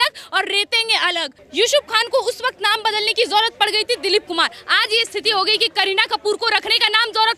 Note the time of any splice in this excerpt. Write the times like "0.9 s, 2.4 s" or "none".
1.4 s